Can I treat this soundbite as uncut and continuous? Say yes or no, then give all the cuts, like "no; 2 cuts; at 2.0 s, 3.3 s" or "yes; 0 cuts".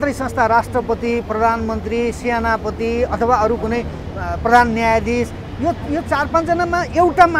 yes; 0 cuts